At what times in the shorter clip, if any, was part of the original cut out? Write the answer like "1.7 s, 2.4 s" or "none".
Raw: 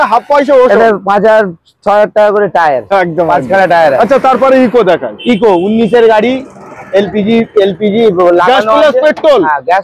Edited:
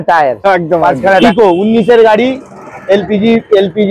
1.2 s